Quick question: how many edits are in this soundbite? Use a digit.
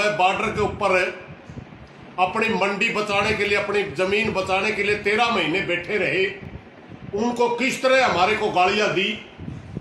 0